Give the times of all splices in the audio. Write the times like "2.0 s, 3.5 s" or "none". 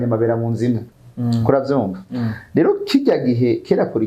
1.0 s